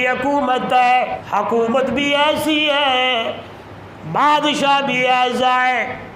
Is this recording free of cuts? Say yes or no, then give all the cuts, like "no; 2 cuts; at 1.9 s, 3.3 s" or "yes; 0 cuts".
no; 1 cut; at 1.2 s